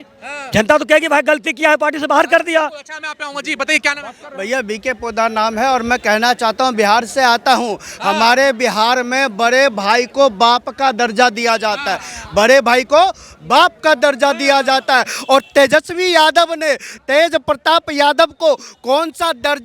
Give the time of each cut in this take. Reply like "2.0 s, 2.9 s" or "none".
none